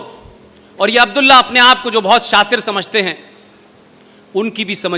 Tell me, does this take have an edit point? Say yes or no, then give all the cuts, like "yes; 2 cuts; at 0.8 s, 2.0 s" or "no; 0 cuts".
no; 0 cuts